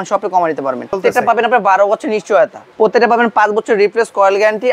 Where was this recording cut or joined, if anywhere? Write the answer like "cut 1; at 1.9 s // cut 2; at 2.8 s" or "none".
cut 1; at 1.0 s // cut 2; at 2.6 s

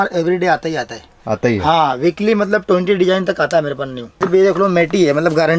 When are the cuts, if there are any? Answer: cut 1; at 4.2 s

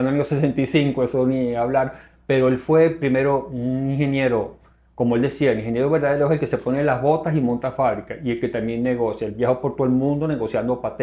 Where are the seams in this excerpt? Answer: none

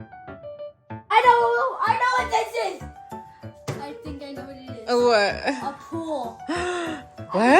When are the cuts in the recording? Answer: cut 1; at 1.0 s

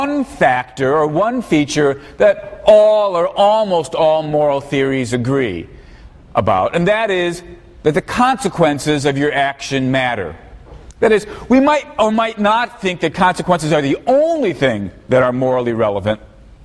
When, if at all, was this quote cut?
cut 1; at 8.7 s

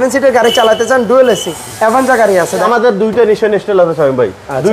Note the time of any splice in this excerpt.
cut 1; at 1.5 s // cut 2; at 2.6 s

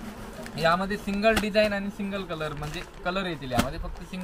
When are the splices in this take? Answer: none

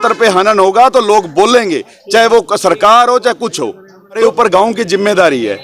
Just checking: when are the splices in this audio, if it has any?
cut 1; at 4.2 s

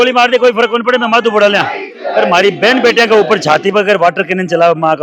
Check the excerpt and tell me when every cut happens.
none

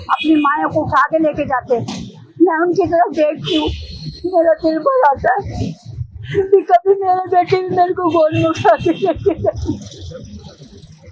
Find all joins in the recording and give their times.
none

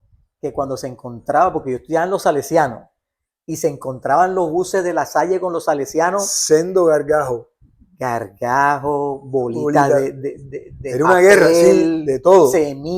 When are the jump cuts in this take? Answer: none

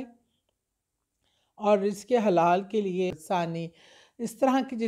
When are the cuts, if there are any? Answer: cut 1; at 3.1 s

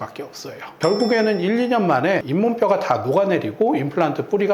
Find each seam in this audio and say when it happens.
cut 1; at 2.2 s

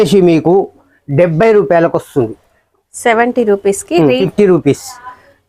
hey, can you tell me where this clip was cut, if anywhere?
cut 1; at 4.2 s

